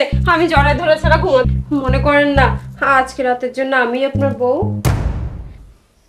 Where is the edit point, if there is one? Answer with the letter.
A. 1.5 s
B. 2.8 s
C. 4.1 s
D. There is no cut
A